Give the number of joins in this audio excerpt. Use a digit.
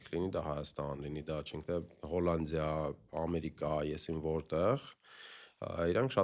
0